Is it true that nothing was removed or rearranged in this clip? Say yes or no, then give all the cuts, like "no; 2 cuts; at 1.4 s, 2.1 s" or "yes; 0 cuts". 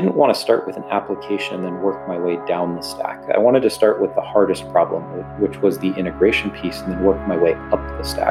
yes; 0 cuts